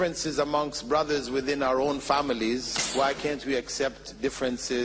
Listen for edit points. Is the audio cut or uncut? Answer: cut